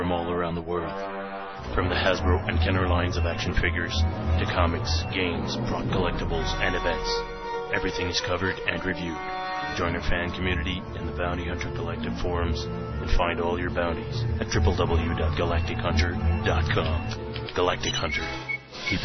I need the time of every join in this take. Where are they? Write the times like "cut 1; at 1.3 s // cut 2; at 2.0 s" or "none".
none